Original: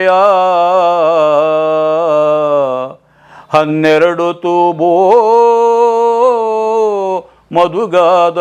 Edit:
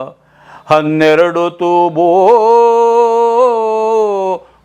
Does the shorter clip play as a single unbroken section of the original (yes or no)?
yes